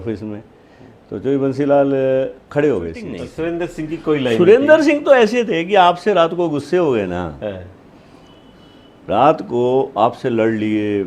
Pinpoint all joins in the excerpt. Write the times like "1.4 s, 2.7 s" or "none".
3.2 s